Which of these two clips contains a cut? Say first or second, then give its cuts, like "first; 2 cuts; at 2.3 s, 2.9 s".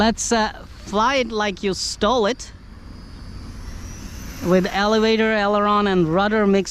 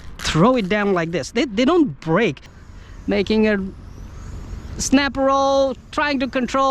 second; 1 cut; at 2.4 s